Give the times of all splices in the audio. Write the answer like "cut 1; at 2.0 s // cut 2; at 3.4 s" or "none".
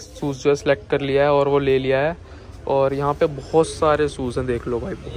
none